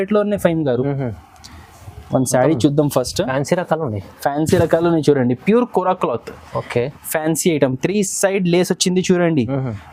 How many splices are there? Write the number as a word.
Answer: zero